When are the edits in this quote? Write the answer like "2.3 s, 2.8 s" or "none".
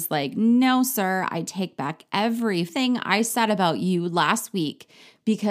2.7 s